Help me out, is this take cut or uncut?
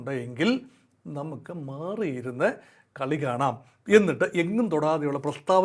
uncut